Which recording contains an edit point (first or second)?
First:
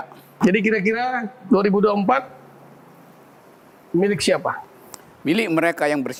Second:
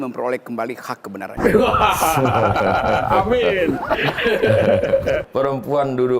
second